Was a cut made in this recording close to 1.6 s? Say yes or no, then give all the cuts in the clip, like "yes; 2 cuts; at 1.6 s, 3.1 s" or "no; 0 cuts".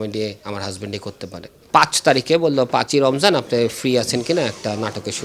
yes; 1 cut; at 1.6 s